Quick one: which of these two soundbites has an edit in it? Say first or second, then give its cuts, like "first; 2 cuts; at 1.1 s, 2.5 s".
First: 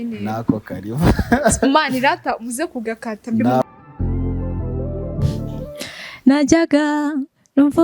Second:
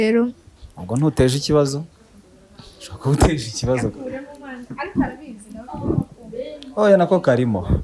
first; 2 cuts; at 3.6 s, 5.7 s